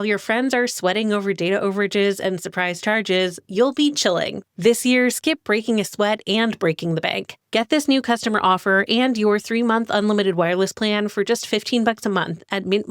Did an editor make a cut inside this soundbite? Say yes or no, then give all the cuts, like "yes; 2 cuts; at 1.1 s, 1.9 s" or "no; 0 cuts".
yes; 1 cut; at 4.4 s